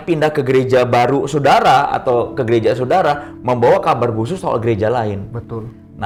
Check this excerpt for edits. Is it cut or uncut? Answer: uncut